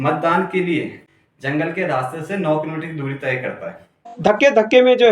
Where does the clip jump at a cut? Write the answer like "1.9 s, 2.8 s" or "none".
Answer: 1.0 s, 4.1 s